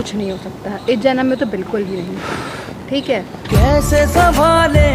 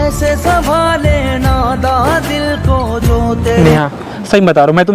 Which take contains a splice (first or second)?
second